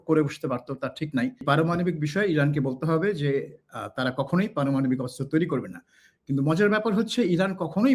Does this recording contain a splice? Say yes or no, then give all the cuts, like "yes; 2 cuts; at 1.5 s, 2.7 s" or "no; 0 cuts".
yes; 1 cut; at 1.4 s